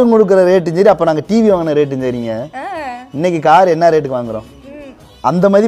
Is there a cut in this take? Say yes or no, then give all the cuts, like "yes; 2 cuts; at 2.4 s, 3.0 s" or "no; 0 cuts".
no; 0 cuts